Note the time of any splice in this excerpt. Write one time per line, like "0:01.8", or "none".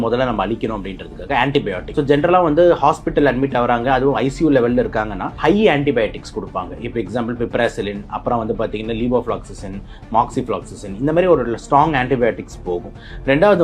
0:01.8
0:05.2